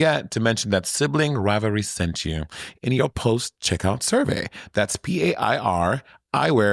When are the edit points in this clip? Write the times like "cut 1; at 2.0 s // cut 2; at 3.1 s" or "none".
none